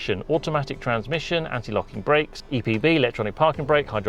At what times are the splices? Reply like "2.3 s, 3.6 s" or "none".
2.4 s